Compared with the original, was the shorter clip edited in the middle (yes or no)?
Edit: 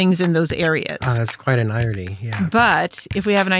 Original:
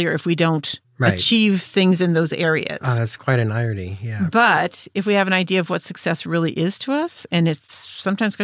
no